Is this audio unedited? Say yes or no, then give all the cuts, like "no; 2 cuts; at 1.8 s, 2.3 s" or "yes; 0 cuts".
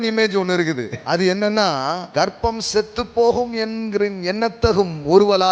no; 2 cuts; at 0.9 s, 2.0 s